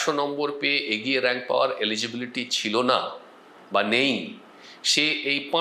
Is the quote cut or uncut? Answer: uncut